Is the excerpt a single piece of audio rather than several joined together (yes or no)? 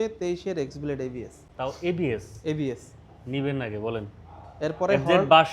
yes